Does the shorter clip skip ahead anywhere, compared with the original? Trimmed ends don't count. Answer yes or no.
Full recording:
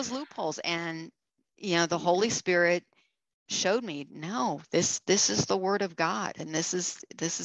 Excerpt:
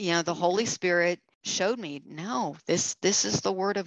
yes